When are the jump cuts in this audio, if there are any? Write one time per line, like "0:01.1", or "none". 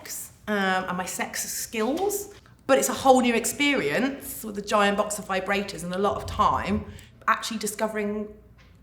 none